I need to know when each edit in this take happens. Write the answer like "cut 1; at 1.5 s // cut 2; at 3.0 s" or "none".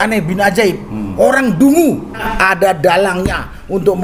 cut 1; at 2.3 s